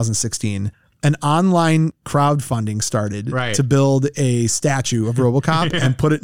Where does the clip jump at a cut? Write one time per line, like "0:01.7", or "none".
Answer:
none